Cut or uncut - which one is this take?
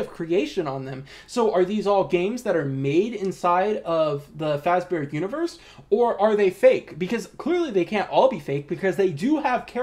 uncut